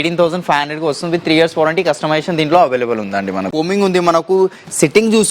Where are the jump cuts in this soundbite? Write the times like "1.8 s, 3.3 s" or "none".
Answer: 3.5 s